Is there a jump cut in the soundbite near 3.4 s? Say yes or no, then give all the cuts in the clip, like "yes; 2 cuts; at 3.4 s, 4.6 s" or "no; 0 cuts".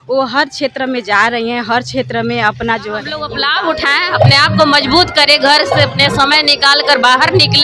yes; 1 cut; at 3.4 s